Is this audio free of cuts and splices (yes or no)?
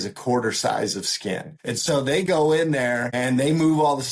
no